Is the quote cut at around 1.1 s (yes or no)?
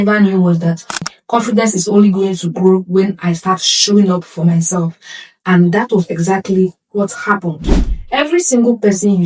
yes